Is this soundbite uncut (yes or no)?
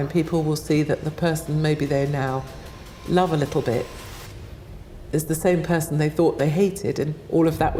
yes